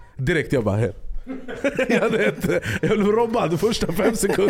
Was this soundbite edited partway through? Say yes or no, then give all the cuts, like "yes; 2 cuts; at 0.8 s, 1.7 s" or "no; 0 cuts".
no; 0 cuts